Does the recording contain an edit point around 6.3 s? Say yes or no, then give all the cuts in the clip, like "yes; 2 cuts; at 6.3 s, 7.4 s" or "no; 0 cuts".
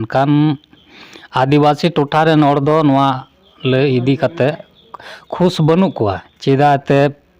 yes; 1 cut; at 6.3 s